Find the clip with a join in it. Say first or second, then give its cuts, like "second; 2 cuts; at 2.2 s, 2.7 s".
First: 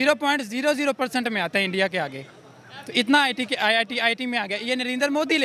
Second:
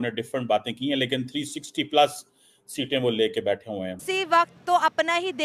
second; 1 cut; at 4.0 s